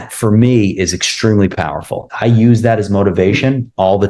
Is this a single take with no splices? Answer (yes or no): no